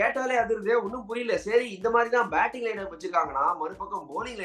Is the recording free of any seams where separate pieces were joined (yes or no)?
yes